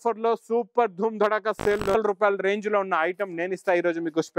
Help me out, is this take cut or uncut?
cut